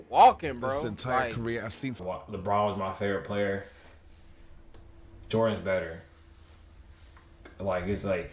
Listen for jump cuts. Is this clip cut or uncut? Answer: cut